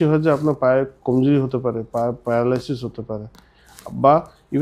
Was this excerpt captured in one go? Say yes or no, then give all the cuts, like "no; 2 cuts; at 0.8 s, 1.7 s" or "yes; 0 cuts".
yes; 0 cuts